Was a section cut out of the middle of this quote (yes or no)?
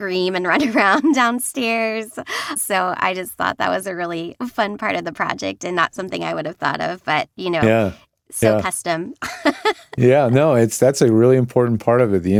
no